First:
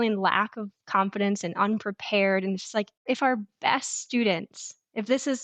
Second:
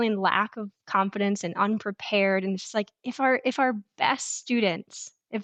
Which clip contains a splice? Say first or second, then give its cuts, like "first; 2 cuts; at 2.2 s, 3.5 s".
first; 1 cut; at 3.0 s